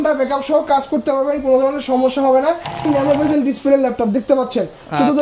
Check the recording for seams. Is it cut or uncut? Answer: cut